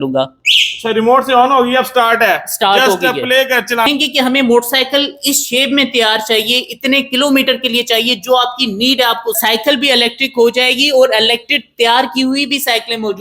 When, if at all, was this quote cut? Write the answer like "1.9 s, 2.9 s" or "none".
3.9 s, 9.4 s